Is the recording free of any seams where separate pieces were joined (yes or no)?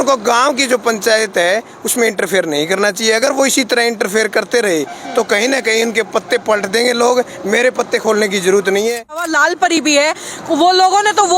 no